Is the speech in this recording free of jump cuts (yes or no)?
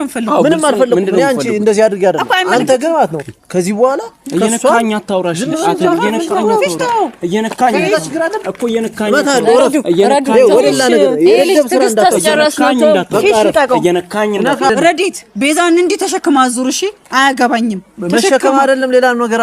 no